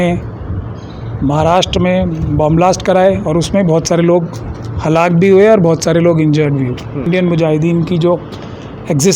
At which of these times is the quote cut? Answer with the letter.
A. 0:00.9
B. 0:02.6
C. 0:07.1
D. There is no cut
C